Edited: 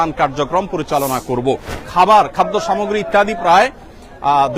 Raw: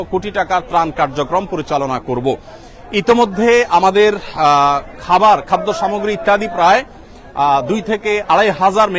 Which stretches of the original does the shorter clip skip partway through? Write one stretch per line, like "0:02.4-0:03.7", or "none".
0:02.6-0:04.9